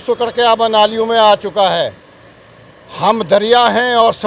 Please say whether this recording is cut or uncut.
uncut